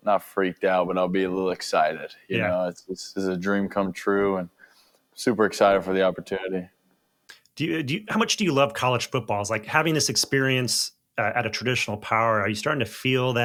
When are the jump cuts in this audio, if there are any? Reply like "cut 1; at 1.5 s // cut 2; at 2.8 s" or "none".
none

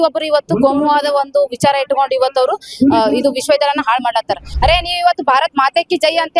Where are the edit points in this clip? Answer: cut 1; at 4.4 s

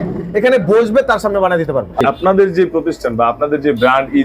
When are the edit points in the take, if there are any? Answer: cut 1; at 2.0 s

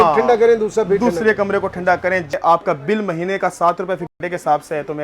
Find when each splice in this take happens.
cut 1; at 2.3 s

